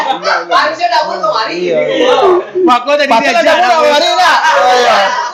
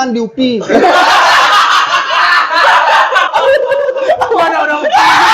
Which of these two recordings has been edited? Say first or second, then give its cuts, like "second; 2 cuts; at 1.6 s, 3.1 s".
second; 1 cut; at 3.3 s